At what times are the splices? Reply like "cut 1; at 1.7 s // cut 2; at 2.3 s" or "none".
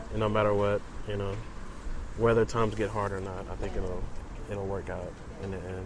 cut 1; at 4.1 s